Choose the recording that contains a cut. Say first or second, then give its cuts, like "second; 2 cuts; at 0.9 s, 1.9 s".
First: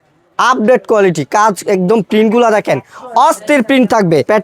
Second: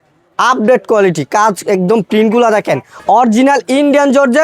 second; 1 cut; at 2.9 s